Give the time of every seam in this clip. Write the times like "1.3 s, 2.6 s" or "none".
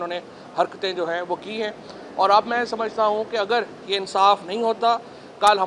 none